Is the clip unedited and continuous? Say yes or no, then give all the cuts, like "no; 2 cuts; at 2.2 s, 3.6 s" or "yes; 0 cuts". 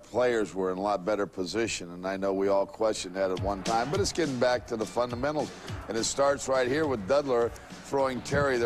no; 1 cut; at 2.5 s